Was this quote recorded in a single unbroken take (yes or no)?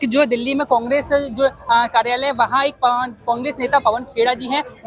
yes